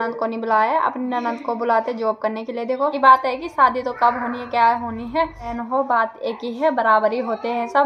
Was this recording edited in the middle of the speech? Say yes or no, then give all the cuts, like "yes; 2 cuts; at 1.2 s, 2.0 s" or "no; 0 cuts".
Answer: yes; 2 cuts; at 2.9 s, 5.6 s